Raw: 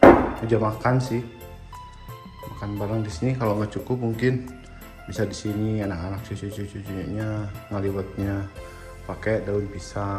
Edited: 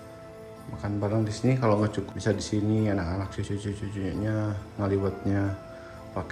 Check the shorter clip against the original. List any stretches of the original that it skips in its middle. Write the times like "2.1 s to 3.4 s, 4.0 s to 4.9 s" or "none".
3.8 s to 4.9 s